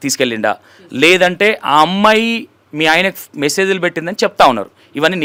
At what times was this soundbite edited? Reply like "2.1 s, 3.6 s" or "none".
none